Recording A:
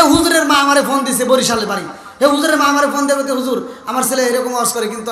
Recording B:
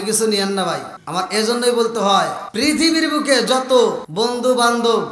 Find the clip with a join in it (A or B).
B